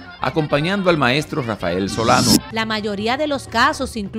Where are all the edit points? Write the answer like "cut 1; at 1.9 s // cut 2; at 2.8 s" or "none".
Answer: cut 1; at 2.5 s